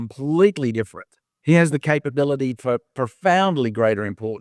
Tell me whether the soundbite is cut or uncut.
uncut